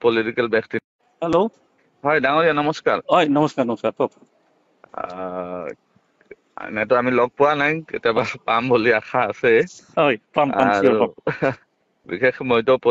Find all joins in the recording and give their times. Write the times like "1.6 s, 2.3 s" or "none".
0.9 s